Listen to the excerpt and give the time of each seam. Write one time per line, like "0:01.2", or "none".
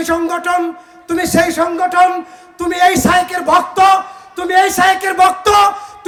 none